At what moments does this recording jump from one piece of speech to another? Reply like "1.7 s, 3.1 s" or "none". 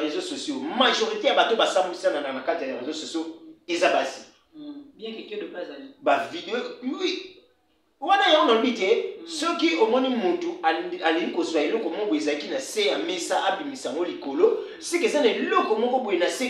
none